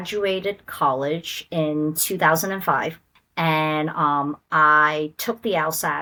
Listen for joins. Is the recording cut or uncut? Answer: uncut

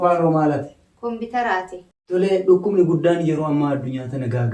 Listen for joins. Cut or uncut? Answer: cut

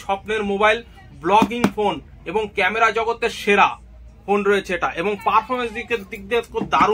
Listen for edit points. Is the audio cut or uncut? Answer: uncut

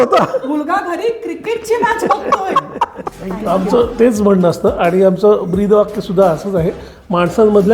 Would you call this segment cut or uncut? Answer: cut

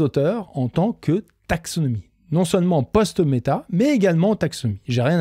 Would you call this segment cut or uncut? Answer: uncut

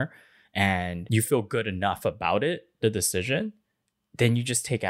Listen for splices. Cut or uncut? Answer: cut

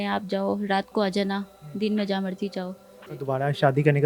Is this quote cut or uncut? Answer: cut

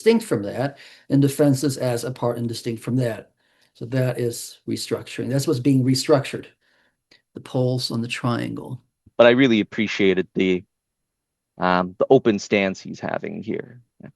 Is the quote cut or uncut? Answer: cut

